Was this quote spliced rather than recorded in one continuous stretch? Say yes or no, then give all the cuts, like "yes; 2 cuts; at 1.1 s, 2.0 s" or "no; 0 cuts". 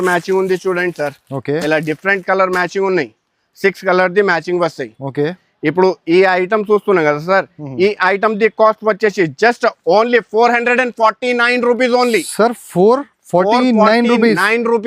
no; 0 cuts